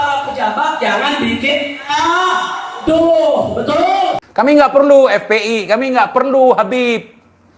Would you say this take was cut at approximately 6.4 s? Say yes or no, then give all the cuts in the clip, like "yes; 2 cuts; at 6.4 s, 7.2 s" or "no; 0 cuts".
no; 1 cut; at 4.2 s